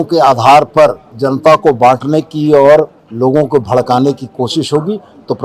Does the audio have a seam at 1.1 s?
yes; 2 cuts; at 1.1 s, 3.0 s

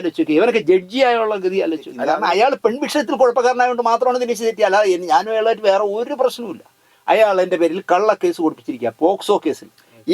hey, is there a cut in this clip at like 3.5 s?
no; 1 cut; at 1.9 s

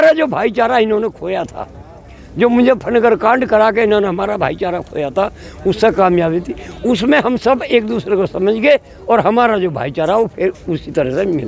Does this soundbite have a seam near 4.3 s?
no; 0 cuts

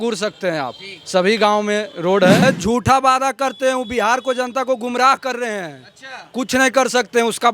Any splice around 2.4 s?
yes; 1 cut; at 2.4 s

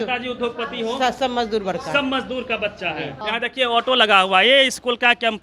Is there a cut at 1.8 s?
no; 1 cut; at 3.2 s

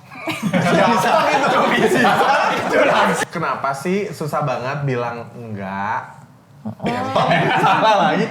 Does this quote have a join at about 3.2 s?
yes; 1 cut; at 3.2 s

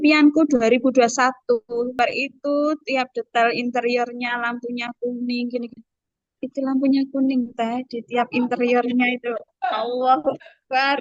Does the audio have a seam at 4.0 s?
no; 1 cut; at 2.0 s

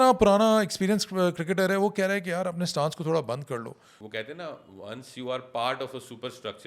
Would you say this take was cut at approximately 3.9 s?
yes; 1 cut; at 3.9 s

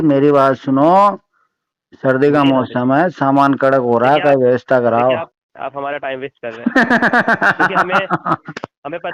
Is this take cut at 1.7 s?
no; 1 cut; at 5.5 s

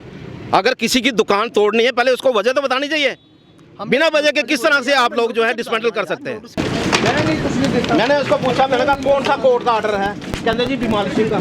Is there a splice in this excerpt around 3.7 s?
no; 1 cut; at 6.6 s

